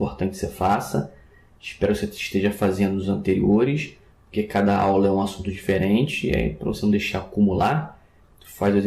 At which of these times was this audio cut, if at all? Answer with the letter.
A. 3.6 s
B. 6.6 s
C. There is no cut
B